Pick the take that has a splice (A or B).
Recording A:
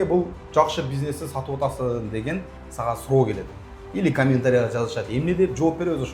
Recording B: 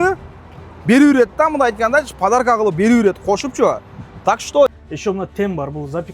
B